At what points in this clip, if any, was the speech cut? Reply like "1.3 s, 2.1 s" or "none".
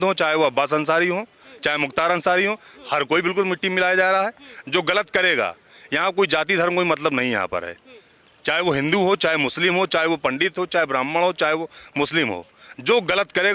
none